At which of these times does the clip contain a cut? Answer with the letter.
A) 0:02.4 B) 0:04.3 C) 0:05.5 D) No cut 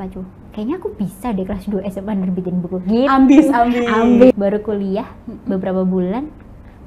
B